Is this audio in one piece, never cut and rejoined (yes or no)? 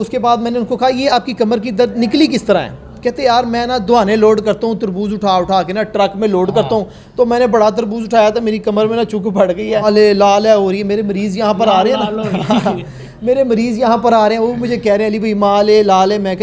no